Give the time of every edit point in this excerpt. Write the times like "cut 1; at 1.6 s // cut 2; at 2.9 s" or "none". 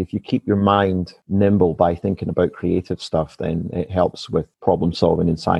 cut 1; at 1.1 s // cut 2; at 4.5 s